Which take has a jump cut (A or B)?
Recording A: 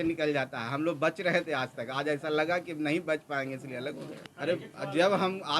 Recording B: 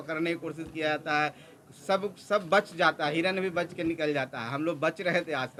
A